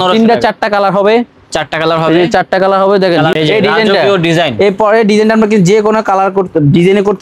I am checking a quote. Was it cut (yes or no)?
yes